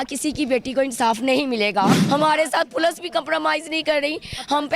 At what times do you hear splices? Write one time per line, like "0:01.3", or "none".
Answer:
0:01.9